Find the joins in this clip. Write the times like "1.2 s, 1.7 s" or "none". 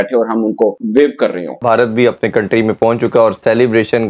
1.5 s